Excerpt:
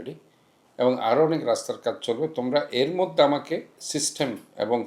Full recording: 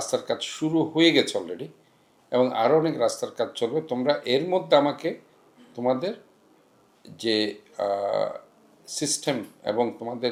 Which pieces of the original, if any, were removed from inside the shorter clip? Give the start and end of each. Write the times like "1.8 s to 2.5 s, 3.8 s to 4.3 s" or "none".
5.3 s to 8.8 s